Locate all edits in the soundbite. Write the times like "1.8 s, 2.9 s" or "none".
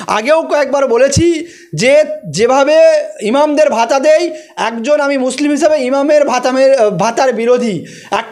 none